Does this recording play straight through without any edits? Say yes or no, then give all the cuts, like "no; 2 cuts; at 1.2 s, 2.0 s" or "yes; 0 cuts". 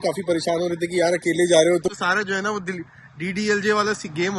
no; 1 cut; at 2.0 s